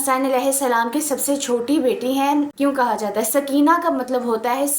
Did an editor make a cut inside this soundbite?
yes; 1 cut; at 2.5 s

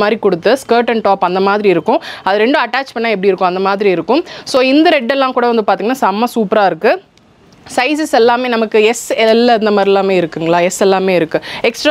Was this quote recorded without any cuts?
yes; 0 cuts

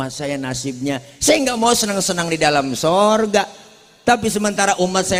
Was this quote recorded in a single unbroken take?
yes; 0 cuts

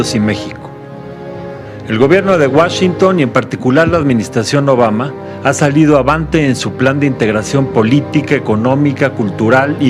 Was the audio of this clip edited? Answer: yes; 1 cut; at 2.0 s

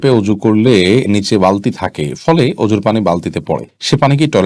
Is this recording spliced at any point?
no; 0 cuts

